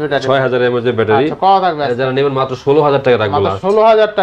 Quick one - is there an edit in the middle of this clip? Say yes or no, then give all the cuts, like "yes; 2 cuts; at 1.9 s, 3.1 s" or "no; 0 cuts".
no; 0 cuts